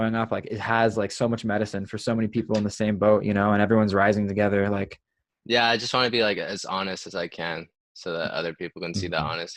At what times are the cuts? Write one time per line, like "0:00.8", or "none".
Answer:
none